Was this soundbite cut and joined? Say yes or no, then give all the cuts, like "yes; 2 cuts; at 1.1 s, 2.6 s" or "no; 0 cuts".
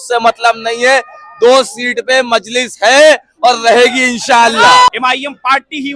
yes; 1 cut; at 4.9 s